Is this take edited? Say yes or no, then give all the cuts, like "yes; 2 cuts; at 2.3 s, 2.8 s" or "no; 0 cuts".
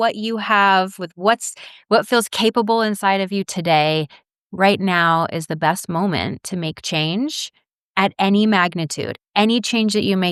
no; 0 cuts